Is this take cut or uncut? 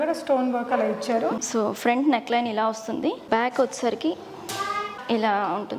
cut